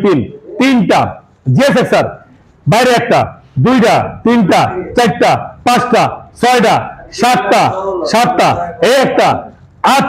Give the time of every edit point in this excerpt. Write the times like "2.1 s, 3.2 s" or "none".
none